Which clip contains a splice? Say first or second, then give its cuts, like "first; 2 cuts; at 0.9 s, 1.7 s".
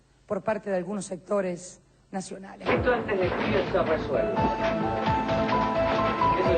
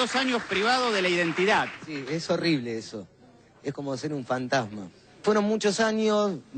first; 1 cut; at 2.5 s